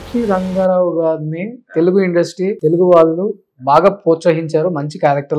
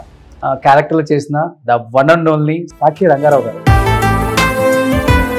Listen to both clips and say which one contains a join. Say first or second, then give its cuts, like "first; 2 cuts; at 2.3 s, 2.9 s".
first; 1 cut; at 2.6 s